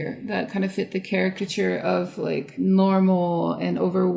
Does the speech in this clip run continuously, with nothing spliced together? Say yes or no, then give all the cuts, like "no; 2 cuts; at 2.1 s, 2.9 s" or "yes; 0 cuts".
no; 1 cut; at 2.5 s